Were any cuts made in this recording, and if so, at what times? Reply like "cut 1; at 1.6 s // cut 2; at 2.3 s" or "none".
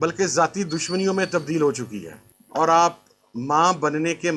cut 1; at 2.4 s